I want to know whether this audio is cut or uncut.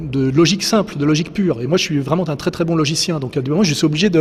uncut